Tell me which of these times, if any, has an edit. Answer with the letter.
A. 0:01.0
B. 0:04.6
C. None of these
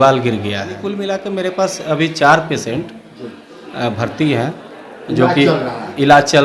A